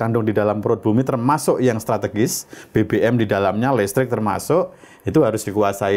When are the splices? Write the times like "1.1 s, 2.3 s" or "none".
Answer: none